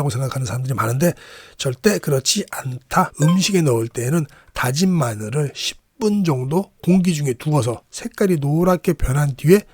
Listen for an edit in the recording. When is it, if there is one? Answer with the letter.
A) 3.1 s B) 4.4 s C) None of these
A